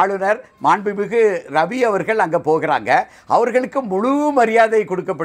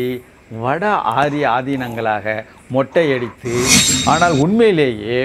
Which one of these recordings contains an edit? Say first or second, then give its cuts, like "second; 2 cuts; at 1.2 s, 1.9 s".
second; 1 cut; at 3.8 s